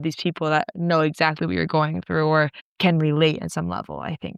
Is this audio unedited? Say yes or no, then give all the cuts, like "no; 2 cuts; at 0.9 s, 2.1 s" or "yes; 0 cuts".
yes; 0 cuts